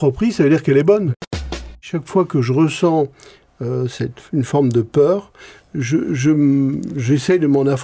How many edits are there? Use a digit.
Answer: 1